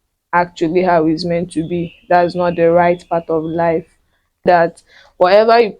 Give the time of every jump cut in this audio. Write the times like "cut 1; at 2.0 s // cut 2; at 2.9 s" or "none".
cut 1; at 4.4 s